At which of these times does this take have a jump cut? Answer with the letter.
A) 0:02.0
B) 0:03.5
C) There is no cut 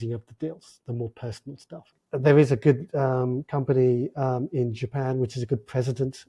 A